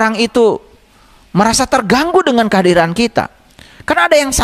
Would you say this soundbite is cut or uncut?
uncut